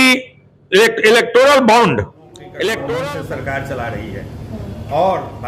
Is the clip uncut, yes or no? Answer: no